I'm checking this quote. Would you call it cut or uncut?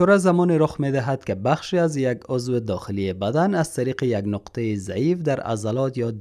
uncut